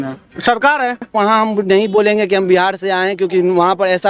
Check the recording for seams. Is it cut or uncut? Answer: cut